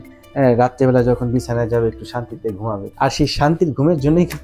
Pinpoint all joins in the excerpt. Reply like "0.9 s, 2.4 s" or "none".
2.8 s